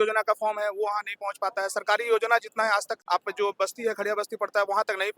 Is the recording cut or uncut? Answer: cut